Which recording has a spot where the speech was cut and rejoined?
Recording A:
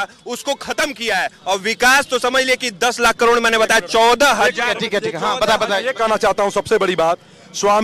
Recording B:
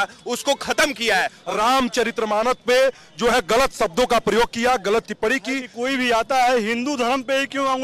B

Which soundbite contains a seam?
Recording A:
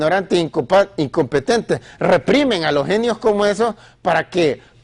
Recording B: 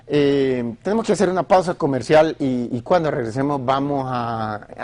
B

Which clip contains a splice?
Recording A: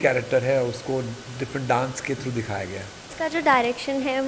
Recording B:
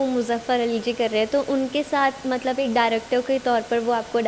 A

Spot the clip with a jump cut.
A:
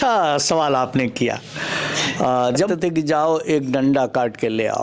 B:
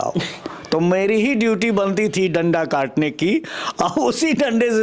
A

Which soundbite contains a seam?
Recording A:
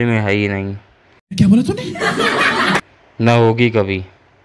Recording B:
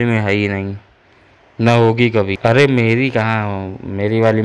B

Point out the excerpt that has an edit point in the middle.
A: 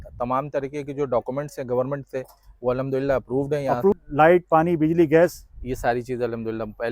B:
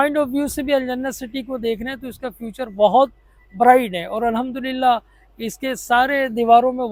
A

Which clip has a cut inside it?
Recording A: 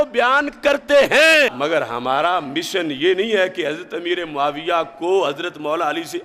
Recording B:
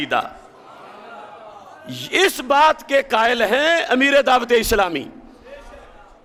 A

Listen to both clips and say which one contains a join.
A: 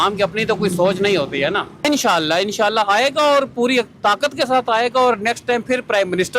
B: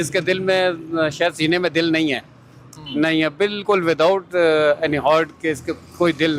A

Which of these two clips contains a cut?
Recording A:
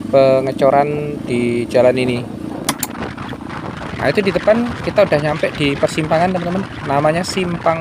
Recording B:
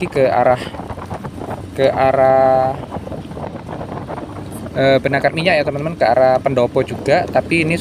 A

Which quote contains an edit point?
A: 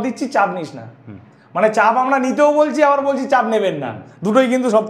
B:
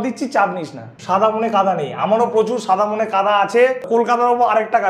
B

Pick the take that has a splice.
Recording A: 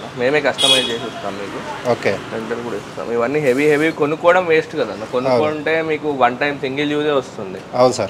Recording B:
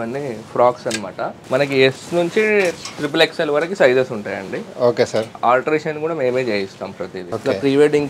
B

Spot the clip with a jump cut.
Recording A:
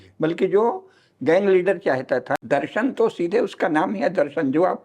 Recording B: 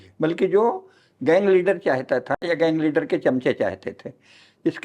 A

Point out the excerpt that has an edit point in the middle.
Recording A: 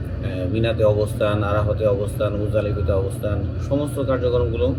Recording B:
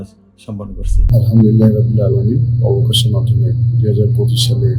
B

